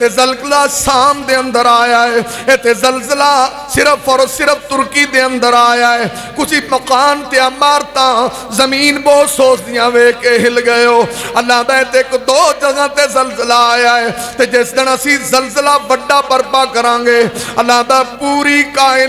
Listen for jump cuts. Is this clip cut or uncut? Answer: uncut